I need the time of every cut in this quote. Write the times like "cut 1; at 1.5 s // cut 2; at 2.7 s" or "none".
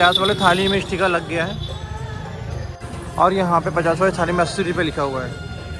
none